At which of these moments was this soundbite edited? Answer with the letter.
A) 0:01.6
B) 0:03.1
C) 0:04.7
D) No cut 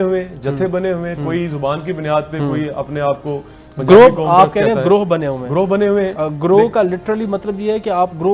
D